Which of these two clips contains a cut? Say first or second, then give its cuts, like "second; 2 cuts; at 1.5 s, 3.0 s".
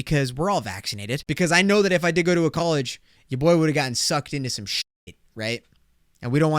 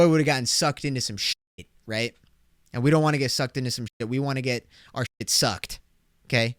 first; 1 cut; at 1.2 s